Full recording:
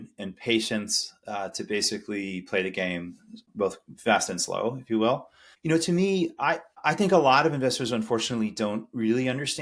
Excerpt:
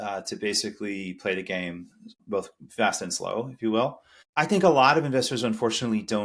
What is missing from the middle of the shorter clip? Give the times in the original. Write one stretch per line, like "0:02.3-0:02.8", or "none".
0:05.5-0:06.7